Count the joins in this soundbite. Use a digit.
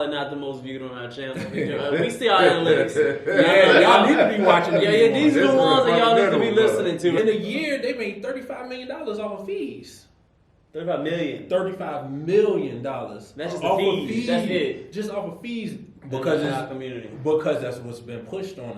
2